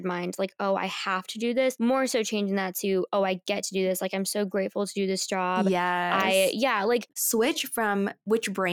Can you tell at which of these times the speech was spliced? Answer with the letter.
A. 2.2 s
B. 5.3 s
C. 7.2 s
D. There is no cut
C